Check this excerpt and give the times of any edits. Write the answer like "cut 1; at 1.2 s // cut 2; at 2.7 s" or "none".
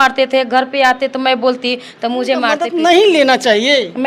cut 1; at 2.7 s